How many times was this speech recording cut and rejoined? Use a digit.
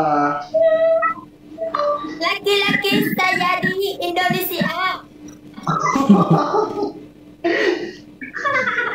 0